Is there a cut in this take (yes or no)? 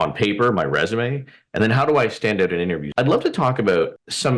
yes